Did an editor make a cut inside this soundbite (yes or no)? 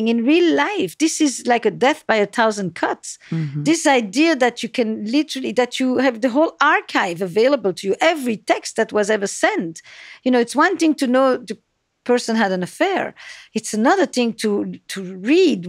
no